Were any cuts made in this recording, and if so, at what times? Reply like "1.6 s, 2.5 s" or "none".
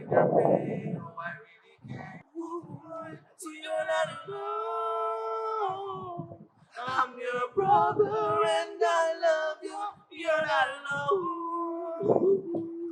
2.4 s